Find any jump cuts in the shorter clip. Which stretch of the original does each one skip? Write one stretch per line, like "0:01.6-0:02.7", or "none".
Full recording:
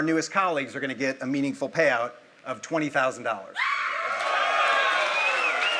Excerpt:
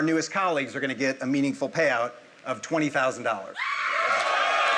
none